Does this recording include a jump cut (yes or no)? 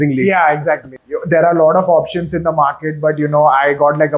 yes